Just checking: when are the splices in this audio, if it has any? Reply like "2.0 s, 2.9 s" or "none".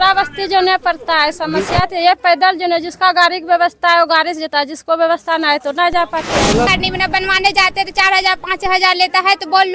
6.7 s

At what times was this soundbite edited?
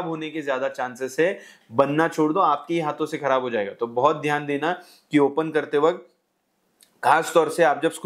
none

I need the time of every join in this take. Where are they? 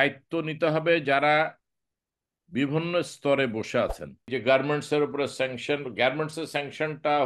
4.2 s

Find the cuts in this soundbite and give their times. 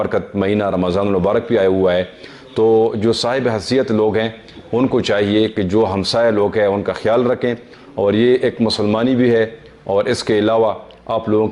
none

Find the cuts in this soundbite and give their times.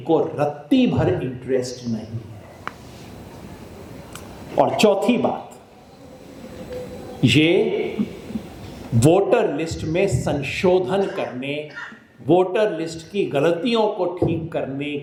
none

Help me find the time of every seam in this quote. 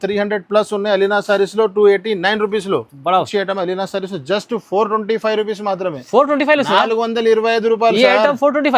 3.2 s

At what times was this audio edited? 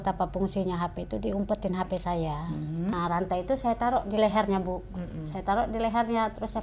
2.9 s

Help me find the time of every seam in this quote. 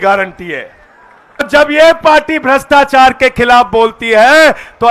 1.5 s

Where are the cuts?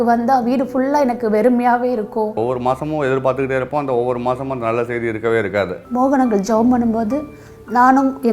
2.4 s, 5.8 s

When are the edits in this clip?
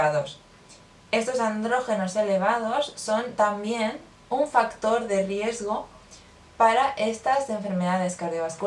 none

